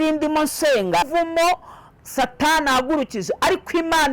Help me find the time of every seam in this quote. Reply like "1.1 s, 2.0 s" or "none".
1.1 s

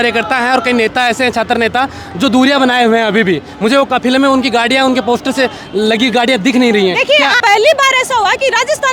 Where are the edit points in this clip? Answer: 7.4 s

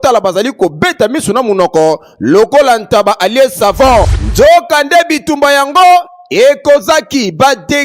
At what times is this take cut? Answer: 4.2 s

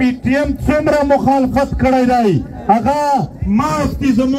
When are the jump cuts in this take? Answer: none

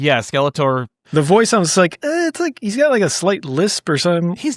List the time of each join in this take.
1.1 s

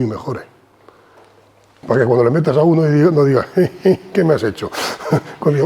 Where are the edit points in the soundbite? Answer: 1.8 s

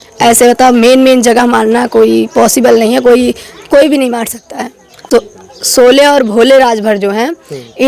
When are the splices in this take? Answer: 4.9 s

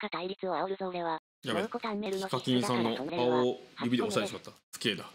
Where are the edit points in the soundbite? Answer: 2.1 s, 3.1 s

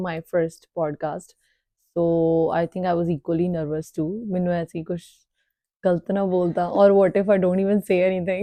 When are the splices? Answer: none

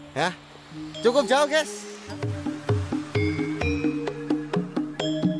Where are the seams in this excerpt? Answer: 2.2 s

